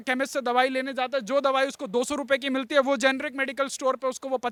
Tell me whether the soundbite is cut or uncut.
uncut